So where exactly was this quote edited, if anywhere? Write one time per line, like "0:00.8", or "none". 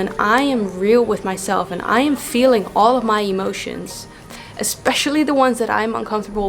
none